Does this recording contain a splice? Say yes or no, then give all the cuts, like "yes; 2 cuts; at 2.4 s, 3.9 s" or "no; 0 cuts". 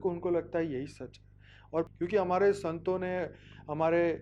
yes; 1 cut; at 1.9 s